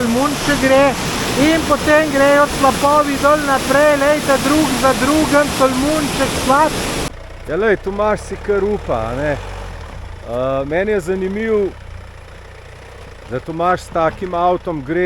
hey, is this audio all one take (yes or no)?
no